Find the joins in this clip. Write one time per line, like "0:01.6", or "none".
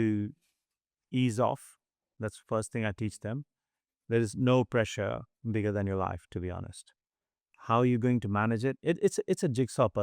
none